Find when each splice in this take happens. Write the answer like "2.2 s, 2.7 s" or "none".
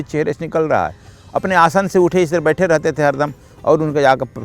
none